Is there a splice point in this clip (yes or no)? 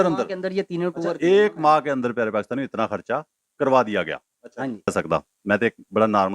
yes